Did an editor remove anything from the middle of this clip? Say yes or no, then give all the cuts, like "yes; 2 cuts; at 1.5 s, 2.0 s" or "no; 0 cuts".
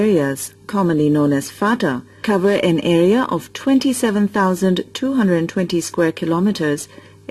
no; 0 cuts